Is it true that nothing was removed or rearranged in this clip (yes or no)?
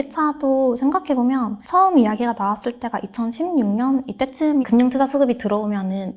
no